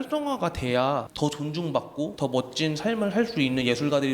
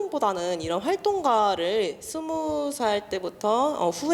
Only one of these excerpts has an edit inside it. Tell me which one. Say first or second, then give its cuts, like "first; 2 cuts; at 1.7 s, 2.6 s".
first; 2 cuts; at 1.1 s, 2.1 s